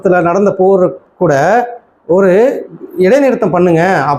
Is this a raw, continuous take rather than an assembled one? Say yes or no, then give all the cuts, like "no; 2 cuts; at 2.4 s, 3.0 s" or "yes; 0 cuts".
yes; 0 cuts